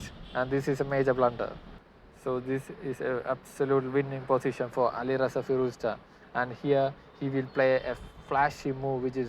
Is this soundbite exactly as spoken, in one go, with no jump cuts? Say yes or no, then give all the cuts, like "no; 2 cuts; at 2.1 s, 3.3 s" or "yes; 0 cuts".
no; 1 cut; at 1.7 s